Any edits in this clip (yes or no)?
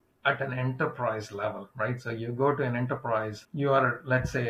yes